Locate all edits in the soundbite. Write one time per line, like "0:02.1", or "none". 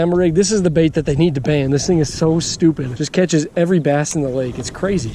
0:02.9